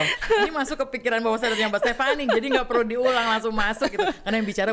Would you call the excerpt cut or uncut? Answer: uncut